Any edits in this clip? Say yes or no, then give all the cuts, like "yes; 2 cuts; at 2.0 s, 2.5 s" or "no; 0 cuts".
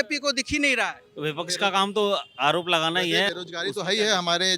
yes; 1 cut; at 3.3 s